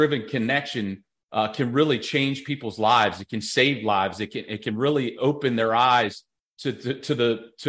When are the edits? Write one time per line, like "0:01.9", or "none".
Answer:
none